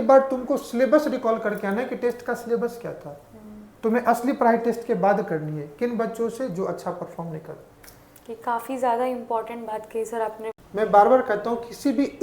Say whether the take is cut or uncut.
cut